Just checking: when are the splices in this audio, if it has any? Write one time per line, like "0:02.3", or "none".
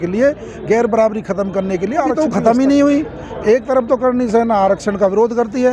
0:02.2